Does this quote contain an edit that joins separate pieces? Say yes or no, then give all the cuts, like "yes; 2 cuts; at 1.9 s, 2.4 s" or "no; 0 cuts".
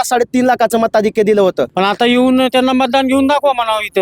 yes; 1 cut; at 1.7 s